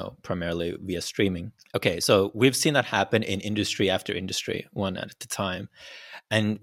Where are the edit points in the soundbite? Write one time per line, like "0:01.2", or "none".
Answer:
0:01.5